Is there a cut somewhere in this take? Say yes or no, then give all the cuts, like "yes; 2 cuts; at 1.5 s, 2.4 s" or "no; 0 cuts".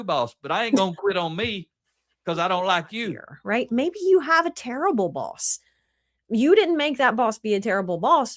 yes; 1 cut; at 3.3 s